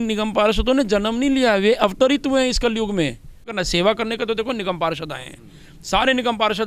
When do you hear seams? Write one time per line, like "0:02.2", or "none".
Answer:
0:03.6